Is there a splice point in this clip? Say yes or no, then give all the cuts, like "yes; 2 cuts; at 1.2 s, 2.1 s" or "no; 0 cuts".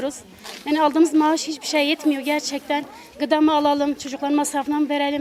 no; 0 cuts